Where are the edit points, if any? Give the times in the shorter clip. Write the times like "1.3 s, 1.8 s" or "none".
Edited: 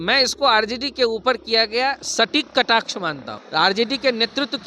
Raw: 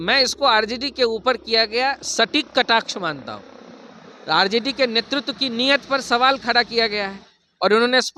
3.3 s